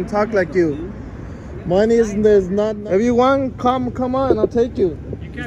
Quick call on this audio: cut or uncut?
cut